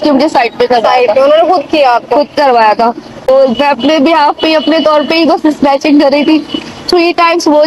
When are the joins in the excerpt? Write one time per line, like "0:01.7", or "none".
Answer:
0:03.3